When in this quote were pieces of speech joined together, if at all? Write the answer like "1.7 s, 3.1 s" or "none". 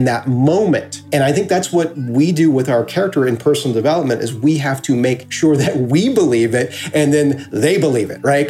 0.9 s, 5.3 s